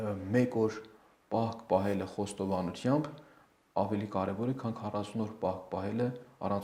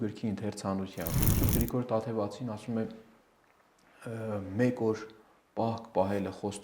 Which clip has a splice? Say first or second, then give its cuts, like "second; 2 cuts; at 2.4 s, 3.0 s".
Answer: second; 1 cut; at 1.2 s